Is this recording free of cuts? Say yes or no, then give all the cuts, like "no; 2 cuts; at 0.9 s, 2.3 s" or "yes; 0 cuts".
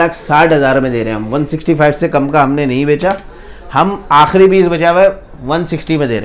yes; 0 cuts